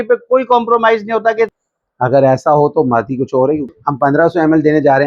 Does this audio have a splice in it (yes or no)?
yes